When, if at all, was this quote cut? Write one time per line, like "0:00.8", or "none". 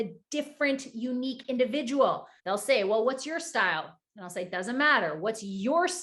0:02.3